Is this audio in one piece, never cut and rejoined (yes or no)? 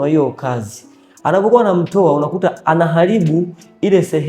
yes